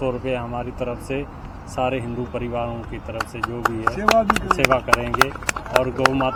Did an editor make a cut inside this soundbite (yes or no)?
no